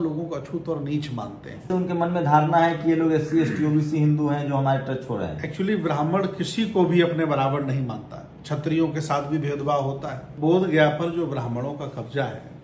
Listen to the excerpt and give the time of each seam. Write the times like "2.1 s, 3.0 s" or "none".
1.7 s, 10.3 s